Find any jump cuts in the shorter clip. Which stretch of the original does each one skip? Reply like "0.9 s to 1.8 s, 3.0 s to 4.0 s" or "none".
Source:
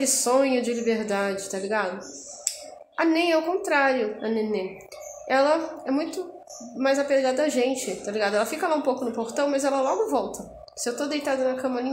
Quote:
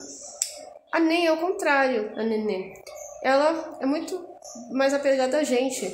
none